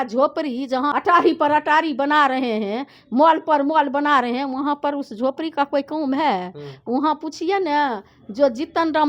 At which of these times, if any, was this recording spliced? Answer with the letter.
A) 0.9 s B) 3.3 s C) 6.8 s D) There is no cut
A